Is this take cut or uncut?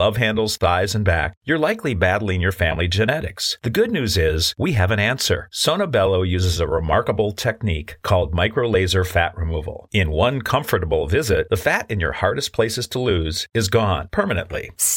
uncut